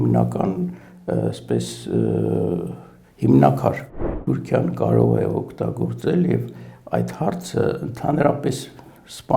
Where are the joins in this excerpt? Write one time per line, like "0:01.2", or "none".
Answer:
0:04.2